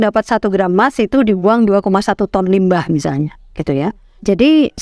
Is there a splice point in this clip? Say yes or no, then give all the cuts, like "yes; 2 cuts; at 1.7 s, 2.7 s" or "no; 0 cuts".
no; 0 cuts